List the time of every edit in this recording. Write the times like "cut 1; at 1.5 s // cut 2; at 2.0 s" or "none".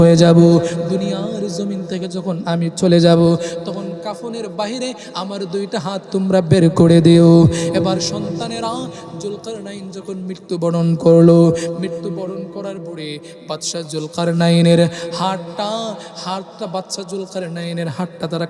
none

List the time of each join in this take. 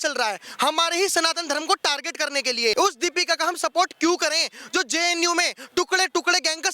cut 1; at 2.7 s

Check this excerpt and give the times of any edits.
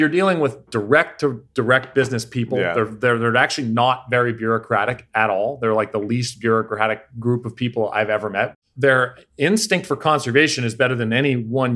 cut 1; at 8.5 s

